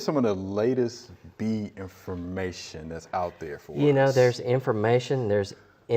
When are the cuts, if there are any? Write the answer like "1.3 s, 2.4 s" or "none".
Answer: 3.5 s